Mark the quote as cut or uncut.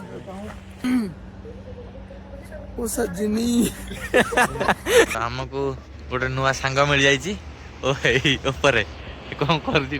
cut